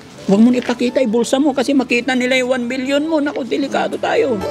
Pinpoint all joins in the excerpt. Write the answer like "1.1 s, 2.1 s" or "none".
none